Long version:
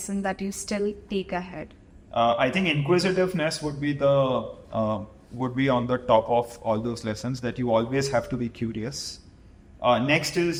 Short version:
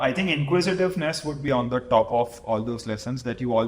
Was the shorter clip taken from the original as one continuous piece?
no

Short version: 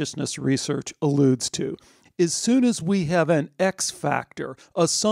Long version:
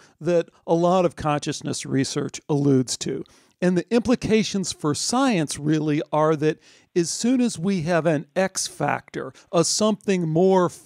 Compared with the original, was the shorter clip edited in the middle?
yes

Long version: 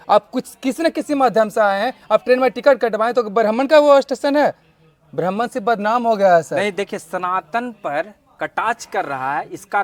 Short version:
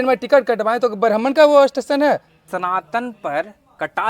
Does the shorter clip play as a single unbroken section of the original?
no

